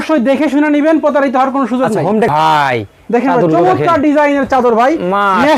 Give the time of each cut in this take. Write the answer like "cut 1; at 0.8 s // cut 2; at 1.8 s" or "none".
cut 1; at 2.3 s